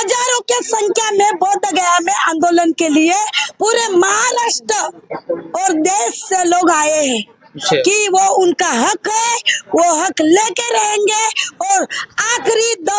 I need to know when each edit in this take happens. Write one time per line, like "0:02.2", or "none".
none

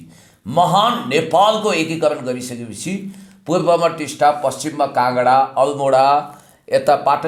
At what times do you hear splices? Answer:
none

